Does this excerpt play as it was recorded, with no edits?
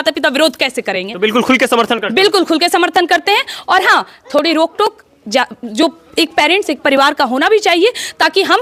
yes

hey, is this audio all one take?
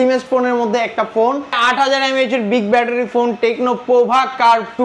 no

